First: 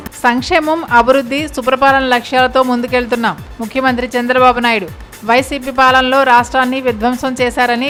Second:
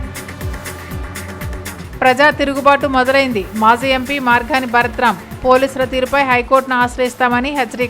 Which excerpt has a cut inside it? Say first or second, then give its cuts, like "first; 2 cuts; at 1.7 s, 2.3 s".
second; 1 cut; at 1.2 s